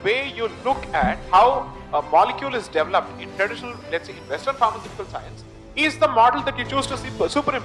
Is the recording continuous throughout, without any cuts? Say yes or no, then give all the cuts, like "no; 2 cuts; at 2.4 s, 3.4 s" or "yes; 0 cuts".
yes; 0 cuts